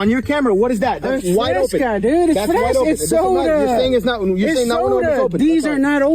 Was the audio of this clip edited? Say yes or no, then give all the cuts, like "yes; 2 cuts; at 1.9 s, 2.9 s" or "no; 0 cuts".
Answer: no; 0 cuts